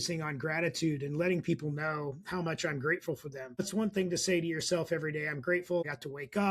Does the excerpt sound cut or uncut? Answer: cut